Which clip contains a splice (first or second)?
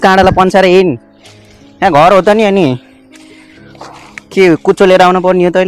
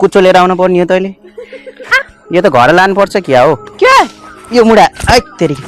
second